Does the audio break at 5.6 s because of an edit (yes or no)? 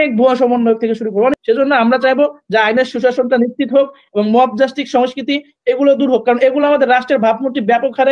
no